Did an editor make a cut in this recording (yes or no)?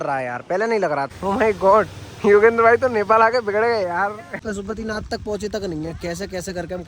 yes